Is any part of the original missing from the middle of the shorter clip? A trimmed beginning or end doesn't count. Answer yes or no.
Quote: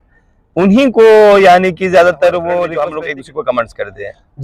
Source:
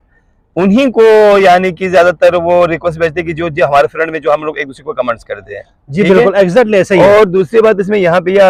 yes